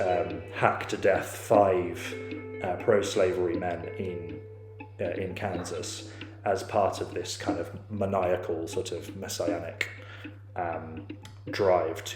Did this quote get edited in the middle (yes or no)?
no